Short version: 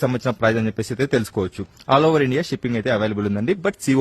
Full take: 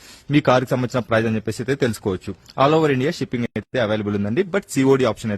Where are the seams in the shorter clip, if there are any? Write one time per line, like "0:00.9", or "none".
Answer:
0:02.8

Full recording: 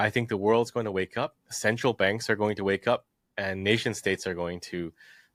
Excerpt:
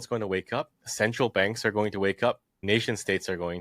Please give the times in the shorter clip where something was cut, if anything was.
0:02.6

